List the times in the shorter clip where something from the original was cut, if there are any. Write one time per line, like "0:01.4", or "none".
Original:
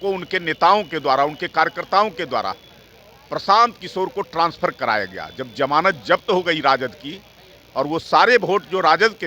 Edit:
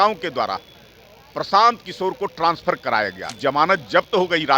0:03.2